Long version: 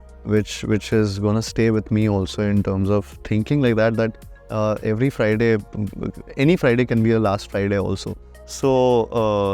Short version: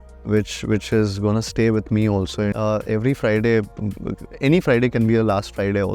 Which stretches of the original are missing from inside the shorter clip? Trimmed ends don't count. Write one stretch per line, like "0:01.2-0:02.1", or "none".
0:02.5-0:04.5